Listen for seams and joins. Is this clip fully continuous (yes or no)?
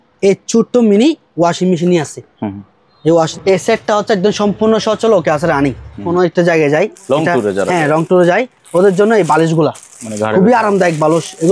no